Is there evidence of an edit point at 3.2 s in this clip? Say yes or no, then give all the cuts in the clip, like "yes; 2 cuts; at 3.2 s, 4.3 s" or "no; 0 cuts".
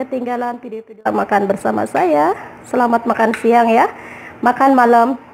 no; 1 cut; at 0.9 s